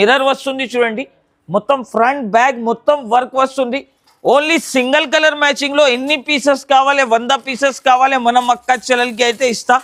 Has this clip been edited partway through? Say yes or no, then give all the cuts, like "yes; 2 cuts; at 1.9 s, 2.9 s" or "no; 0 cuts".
no; 0 cuts